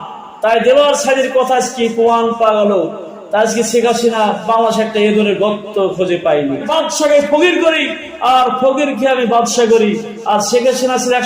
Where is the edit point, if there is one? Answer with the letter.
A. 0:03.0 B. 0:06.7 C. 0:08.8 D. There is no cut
B